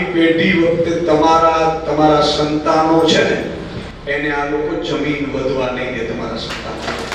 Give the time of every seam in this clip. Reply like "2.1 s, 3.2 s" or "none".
none